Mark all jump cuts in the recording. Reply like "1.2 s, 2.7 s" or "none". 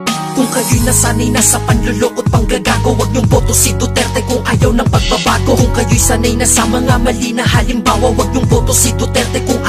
none